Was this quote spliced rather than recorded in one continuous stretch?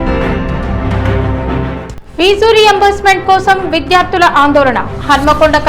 no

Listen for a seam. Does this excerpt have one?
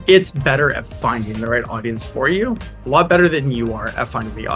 no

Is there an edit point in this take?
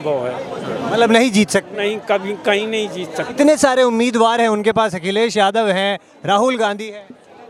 no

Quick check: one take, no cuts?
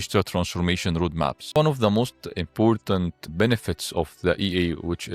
no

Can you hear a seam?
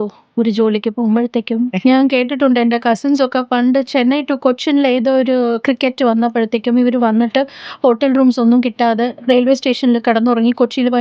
yes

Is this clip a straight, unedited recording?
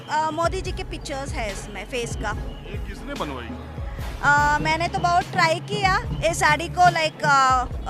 yes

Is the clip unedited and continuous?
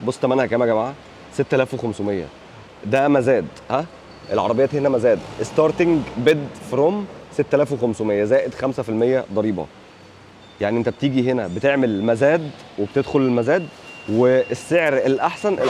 yes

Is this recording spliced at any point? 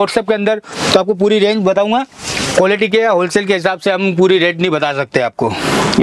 no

